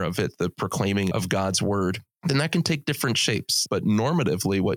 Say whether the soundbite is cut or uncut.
cut